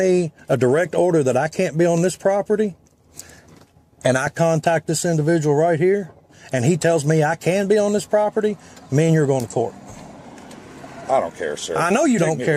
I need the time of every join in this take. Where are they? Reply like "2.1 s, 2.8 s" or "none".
none